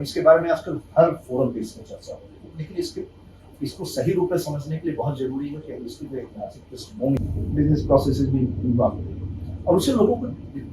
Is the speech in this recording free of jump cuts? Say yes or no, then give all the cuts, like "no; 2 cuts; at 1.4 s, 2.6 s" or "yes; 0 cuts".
no; 1 cut; at 7.2 s